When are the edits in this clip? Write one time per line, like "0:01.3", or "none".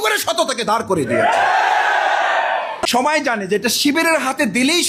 0:02.8